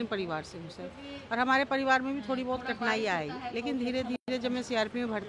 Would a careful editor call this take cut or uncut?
uncut